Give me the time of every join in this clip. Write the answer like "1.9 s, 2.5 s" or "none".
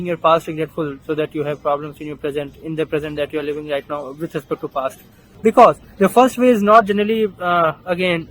5.3 s